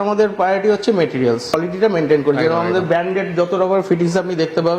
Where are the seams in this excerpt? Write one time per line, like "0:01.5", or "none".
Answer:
0:01.6